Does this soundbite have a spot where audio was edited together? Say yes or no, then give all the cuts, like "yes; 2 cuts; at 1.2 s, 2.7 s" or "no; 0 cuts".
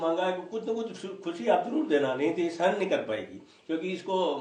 no; 0 cuts